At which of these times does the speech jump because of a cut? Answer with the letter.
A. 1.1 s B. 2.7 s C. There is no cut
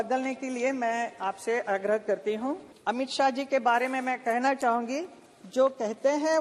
B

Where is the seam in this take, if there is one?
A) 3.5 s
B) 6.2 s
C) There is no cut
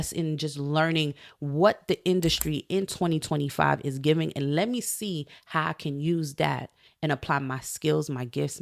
C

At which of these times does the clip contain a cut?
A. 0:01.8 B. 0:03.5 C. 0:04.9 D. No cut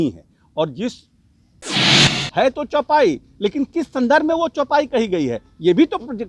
A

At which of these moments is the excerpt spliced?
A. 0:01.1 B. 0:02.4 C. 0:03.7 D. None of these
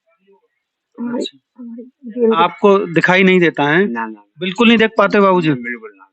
B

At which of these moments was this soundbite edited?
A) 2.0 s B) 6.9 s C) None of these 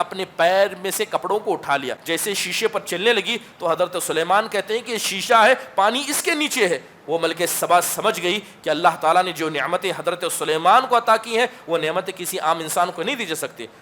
A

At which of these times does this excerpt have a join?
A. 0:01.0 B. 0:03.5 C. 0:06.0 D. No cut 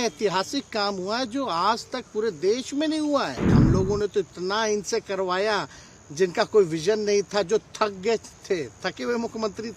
B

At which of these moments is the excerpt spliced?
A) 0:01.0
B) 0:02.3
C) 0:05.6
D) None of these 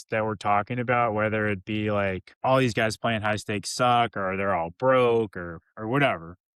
B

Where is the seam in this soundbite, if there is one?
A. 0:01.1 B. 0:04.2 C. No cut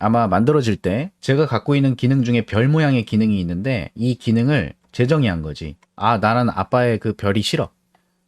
A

